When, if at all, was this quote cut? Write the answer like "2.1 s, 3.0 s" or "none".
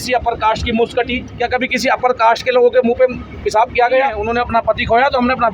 1.3 s, 4.2 s